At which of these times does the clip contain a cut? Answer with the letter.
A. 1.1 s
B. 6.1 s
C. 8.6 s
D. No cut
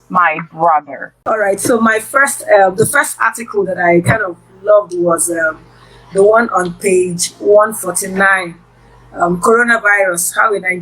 A